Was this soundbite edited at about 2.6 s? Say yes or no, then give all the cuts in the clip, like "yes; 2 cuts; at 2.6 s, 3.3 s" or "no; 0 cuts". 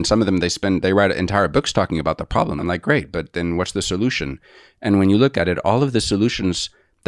yes; 1 cut; at 2.6 s